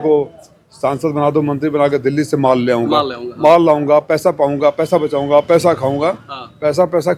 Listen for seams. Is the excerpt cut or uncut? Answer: uncut